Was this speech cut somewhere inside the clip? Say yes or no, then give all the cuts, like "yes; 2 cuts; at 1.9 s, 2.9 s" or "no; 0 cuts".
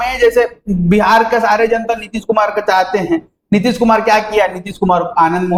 no; 0 cuts